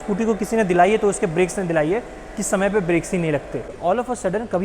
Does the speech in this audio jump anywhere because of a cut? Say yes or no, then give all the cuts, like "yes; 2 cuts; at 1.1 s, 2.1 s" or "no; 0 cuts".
yes; 1 cut; at 3.7 s